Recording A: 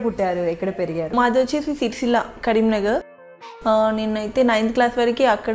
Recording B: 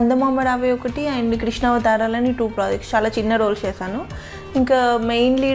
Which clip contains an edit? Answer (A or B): A